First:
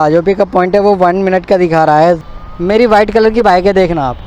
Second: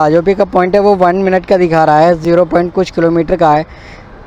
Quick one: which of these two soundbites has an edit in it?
first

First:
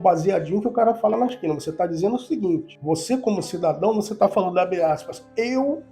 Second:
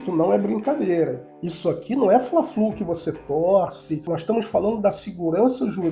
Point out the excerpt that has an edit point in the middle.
second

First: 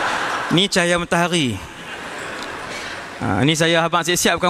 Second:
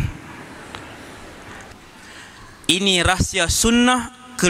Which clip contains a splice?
second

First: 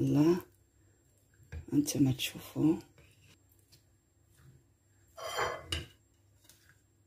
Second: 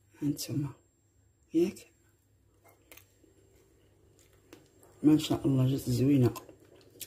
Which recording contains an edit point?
first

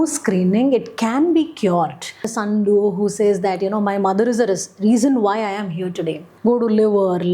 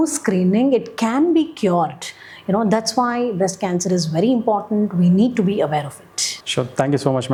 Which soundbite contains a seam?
first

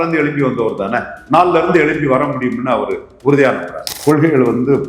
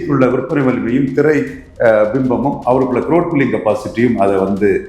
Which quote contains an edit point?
first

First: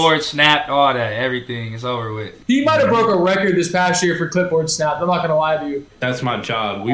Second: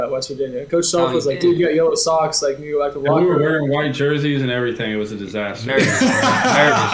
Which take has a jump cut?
first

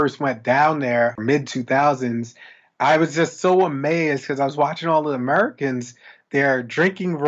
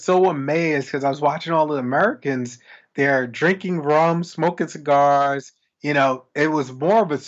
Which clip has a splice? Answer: first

